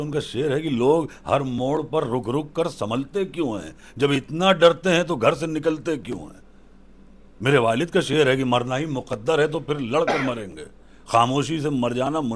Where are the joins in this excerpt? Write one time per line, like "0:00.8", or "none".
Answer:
none